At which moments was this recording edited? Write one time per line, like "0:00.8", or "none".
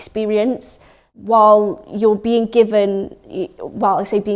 0:01.0